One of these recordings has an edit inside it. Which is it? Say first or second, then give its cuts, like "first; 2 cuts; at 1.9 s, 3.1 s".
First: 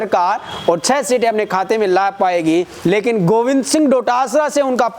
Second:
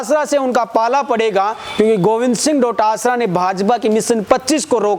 first; 1 cut; at 2.7 s